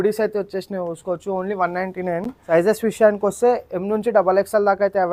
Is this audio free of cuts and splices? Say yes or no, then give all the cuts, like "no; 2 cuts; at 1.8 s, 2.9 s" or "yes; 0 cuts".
no; 1 cut; at 2.3 s